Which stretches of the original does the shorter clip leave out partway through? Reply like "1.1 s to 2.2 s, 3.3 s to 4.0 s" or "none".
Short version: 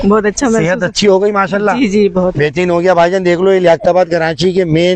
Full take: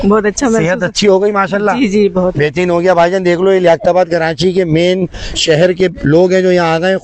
none